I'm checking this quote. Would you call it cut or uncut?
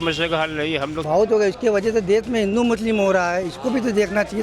cut